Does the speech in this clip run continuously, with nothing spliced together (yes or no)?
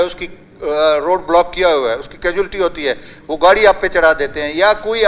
yes